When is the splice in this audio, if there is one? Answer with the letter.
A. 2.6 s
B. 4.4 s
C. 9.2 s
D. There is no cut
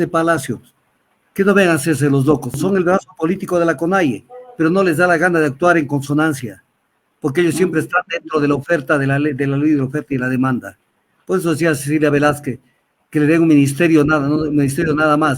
A